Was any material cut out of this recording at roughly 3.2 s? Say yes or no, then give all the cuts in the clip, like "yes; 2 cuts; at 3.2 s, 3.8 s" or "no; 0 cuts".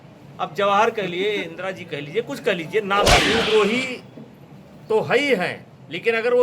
yes; 1 cut; at 3.2 s